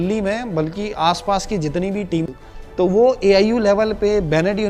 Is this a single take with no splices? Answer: no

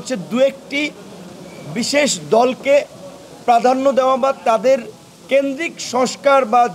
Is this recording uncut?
yes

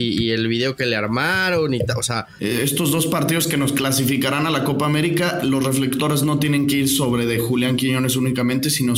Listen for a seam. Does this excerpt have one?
yes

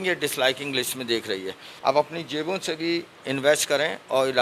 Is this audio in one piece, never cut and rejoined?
no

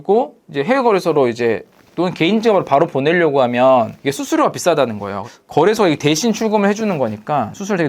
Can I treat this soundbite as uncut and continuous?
no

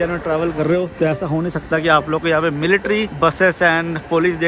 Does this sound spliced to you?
yes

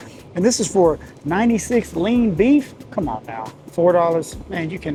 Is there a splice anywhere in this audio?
no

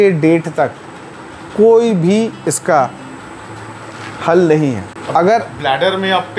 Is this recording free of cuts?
no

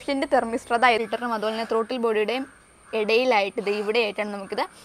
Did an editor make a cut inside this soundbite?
yes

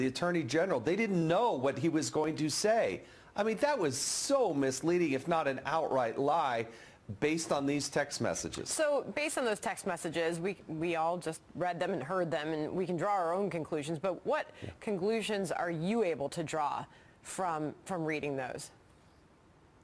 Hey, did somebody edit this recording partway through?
no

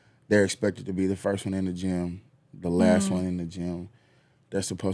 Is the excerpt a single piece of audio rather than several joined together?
yes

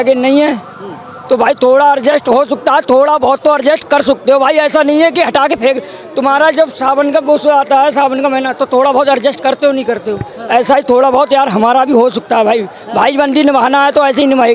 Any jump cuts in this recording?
no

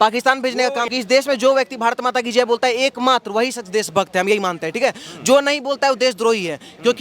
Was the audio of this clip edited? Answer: yes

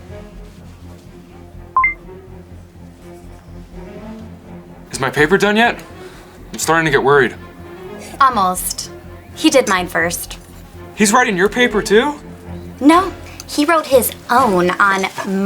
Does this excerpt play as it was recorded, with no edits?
yes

